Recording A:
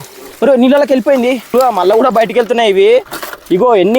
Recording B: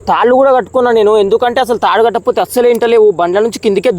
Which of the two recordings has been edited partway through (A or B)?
A